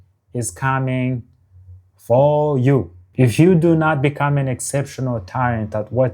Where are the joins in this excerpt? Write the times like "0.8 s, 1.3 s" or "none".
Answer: 3.0 s